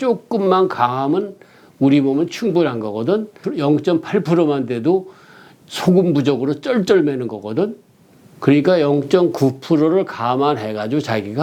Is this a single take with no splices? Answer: yes; 0 cuts

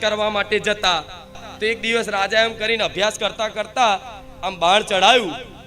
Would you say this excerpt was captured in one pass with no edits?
no; 1 cut; at 1.5 s

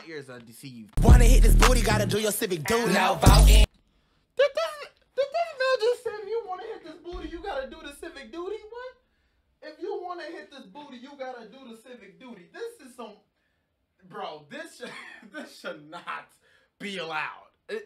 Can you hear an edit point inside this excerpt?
yes; 1 cut; at 0.9 s

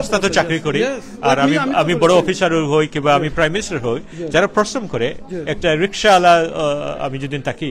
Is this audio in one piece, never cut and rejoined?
yes; 0 cuts

